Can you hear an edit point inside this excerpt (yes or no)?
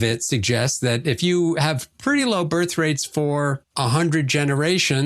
yes